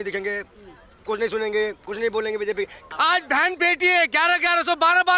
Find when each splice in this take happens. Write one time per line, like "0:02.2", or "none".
0:02.8